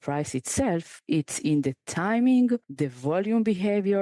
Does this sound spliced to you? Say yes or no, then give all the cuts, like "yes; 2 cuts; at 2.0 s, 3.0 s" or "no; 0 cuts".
yes; 2 cuts; at 0.9 s, 2.7 s